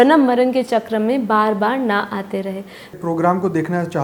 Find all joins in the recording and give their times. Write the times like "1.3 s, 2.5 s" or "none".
2.9 s